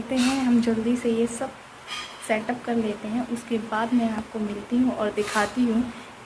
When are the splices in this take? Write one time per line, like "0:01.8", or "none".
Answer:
none